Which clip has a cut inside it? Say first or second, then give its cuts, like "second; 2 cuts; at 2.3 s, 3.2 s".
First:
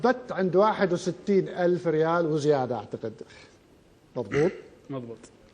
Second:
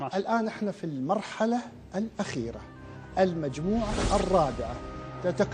first; 1 cut; at 4.4 s